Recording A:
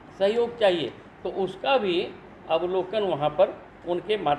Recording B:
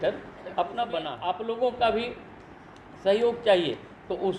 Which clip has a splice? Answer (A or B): B